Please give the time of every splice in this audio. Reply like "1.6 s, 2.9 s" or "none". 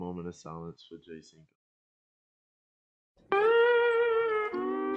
none